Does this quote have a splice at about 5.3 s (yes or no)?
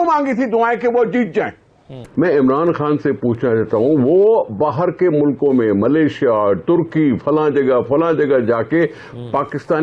no